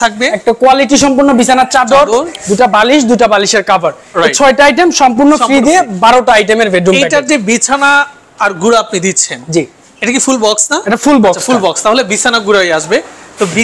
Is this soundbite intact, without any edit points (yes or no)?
yes